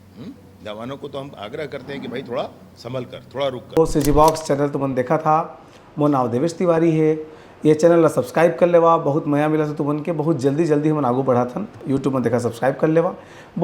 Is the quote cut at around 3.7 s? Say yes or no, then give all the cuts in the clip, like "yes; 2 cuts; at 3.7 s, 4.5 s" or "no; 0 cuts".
yes; 1 cut; at 3.7 s